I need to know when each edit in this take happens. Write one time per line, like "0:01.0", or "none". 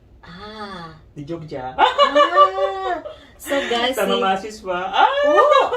0:03.2
0:05.0